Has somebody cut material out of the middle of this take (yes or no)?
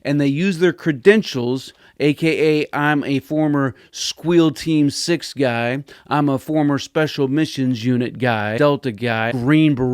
yes